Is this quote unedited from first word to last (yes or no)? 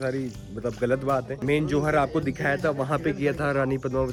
yes